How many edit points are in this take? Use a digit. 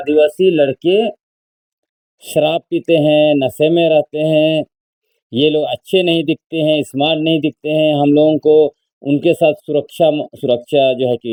0